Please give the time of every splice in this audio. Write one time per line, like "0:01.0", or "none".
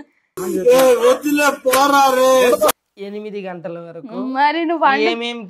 none